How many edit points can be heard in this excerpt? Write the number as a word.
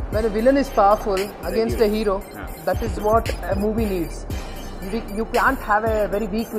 zero